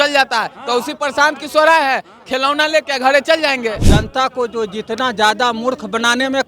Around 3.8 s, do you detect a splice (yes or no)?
yes